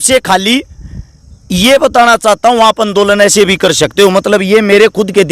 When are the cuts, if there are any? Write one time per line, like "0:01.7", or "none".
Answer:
none